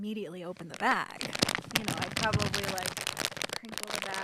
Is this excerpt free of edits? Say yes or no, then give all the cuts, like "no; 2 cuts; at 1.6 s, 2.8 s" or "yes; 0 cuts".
yes; 0 cuts